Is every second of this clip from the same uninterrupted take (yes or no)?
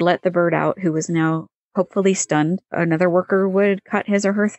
no